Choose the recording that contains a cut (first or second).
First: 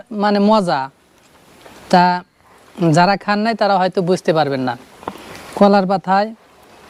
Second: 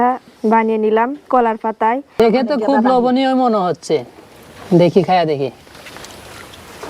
second